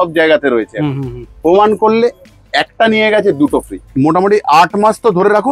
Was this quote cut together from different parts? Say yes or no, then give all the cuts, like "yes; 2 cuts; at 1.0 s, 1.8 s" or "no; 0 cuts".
yes; 1 cut; at 3.9 s